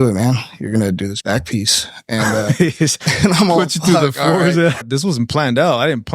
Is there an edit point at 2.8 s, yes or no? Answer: no